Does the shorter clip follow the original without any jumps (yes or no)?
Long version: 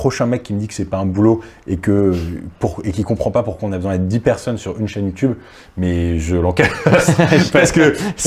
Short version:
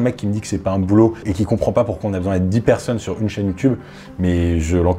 no